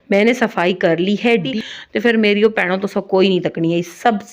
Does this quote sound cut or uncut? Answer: cut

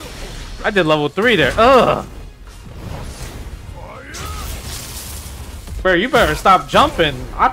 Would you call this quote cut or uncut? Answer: uncut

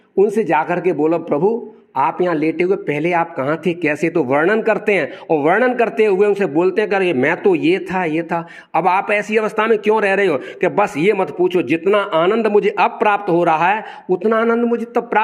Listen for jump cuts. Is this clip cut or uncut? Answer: uncut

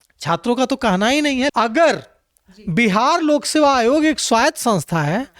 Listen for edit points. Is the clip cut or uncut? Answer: cut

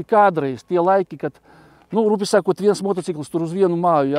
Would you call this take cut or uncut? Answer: uncut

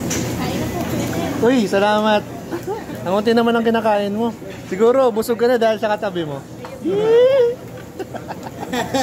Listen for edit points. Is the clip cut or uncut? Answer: uncut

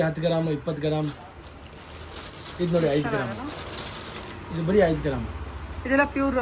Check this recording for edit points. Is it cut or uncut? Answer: uncut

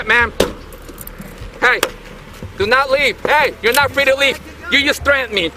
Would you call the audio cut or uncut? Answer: uncut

